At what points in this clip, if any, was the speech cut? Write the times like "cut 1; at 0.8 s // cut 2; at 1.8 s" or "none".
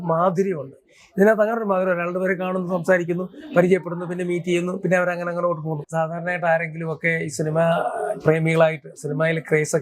cut 1; at 5.8 s